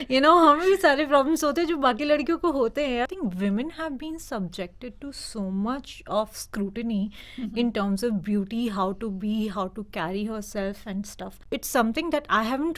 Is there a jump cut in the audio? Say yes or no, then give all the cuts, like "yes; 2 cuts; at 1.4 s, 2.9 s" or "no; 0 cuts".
yes; 2 cuts; at 3.1 s, 11.4 s